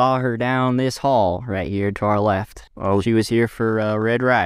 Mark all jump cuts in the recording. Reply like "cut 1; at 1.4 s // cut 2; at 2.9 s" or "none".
none